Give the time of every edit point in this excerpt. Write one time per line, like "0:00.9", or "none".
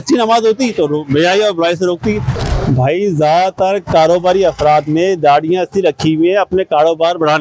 0:02.3

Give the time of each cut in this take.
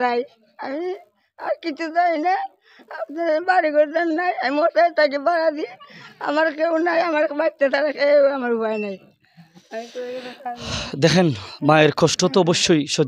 none

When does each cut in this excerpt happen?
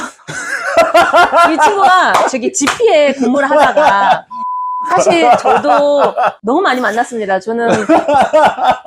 0:04.9

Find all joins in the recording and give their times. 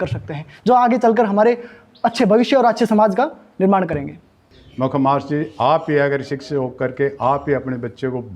0:04.2

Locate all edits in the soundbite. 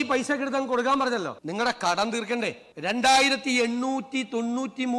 0:01.4
0:02.7

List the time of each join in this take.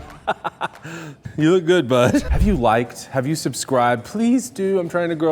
0:01.2
0:02.3

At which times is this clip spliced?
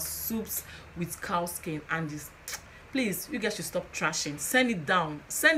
none

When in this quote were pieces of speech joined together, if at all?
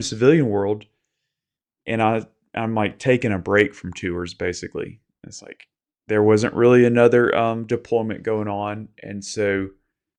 none

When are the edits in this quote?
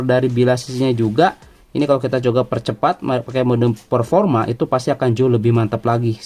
none

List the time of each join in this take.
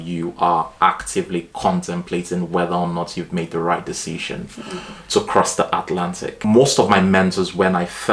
0:06.4

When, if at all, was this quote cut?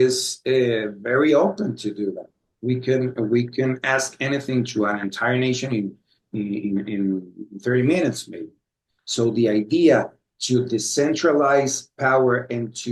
none

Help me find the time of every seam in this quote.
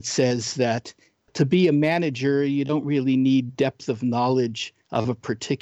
0:01.3

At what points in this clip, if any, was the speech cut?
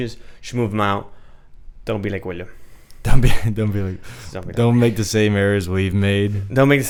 none

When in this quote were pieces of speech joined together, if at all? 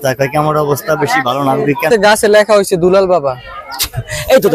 0:01.9

